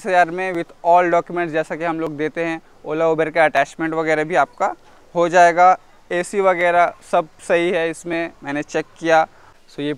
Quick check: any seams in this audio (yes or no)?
no